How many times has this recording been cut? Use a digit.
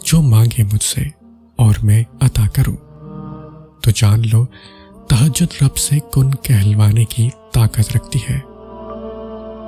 1